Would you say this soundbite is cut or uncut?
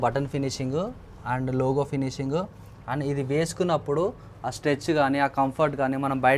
uncut